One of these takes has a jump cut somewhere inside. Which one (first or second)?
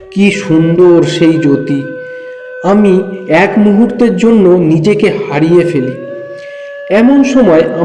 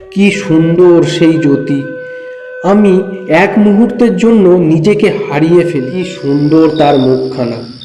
second